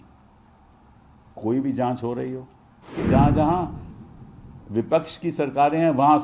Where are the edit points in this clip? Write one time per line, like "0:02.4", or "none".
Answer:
0:03.0